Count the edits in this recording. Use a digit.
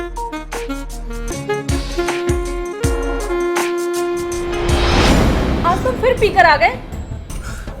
2